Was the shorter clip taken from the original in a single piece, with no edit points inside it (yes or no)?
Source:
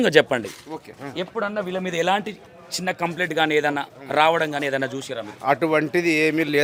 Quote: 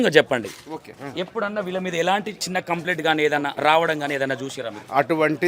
no